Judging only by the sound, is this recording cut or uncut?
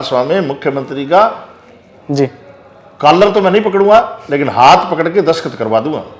uncut